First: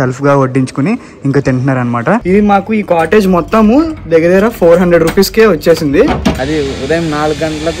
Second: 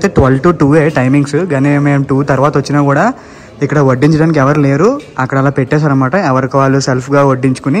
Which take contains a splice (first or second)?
first